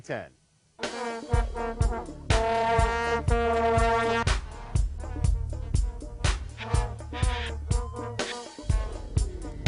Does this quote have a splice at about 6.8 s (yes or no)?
yes